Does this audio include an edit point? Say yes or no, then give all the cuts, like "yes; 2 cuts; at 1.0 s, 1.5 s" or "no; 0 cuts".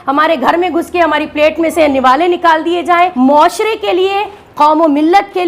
yes; 1 cut; at 3.1 s